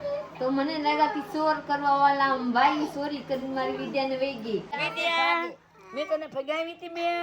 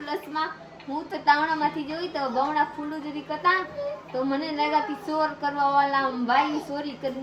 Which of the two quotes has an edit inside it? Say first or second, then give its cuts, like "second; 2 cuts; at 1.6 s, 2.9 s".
first; 1 cut; at 4.7 s